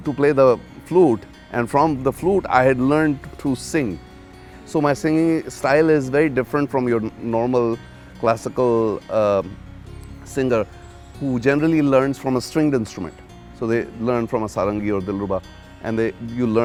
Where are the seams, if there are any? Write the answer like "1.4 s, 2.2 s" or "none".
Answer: none